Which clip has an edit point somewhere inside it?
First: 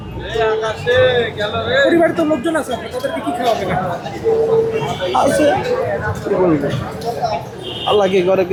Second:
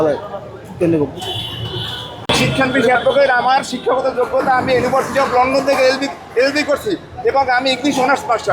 second; 1 cut; at 2.2 s

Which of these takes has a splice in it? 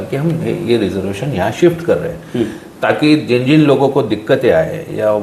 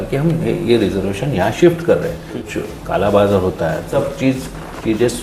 second; 2 cuts; at 2.3 s, 4.0 s

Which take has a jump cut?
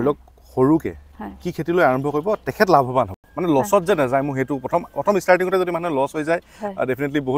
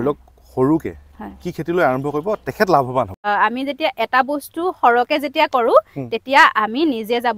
second; 1 cut; at 3.2 s

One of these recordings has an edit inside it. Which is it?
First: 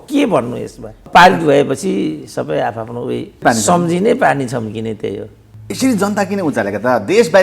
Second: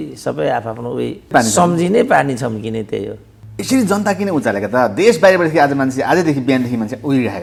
first; 1 cut; at 1.0 s

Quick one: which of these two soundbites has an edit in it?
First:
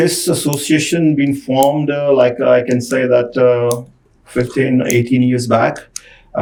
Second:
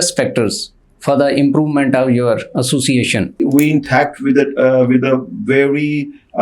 second; 1 cut; at 3.4 s

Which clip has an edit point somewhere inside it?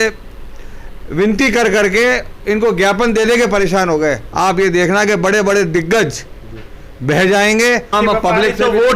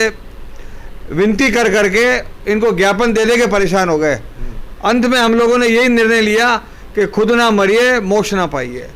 first; 2 cuts; at 4.3 s, 7.9 s

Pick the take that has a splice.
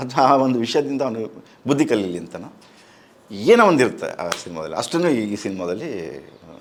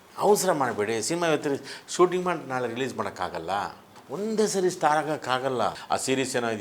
second; 2 cuts; at 4.0 s, 5.8 s

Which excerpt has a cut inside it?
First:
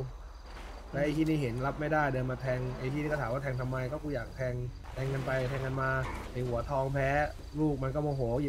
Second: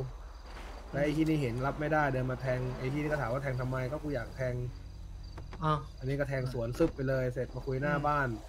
first; 3 cuts; at 4.8 s, 6.2 s, 7.4 s

